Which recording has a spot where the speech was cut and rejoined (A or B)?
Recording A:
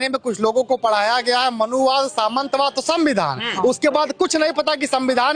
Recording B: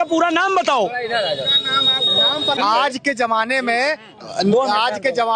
B